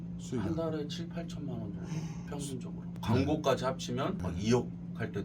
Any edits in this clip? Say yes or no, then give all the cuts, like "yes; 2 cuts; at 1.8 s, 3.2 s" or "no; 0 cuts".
yes; 1 cut; at 3.0 s